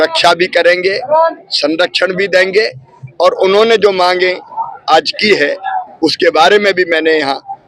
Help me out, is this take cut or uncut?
uncut